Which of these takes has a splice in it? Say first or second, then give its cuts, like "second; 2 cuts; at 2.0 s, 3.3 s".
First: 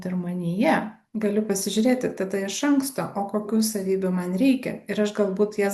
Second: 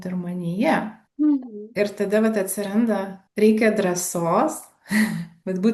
first; 1 cut; at 1.0 s